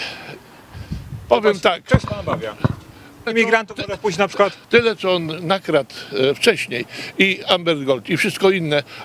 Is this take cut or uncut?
cut